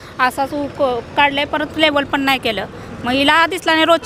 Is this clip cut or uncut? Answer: uncut